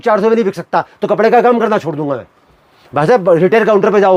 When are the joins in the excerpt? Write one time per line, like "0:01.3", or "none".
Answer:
none